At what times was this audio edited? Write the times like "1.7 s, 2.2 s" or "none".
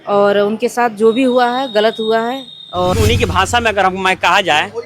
2.9 s